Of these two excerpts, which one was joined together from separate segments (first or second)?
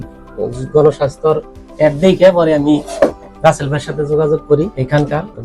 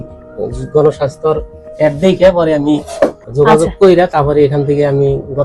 second